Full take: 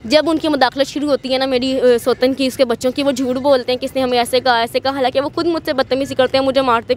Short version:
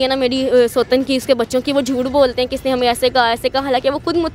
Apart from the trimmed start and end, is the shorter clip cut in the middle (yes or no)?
no